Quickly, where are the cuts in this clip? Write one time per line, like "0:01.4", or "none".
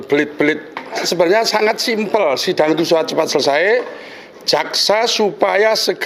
0:01.0